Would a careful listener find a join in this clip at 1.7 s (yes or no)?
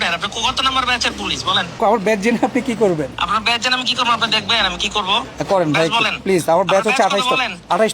yes